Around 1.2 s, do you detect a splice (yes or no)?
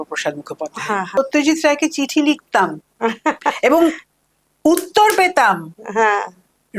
yes